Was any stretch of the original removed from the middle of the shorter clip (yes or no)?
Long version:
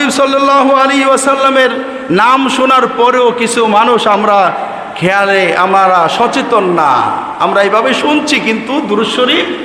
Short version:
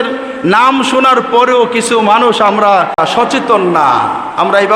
yes